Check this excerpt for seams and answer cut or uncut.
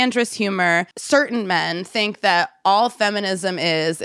cut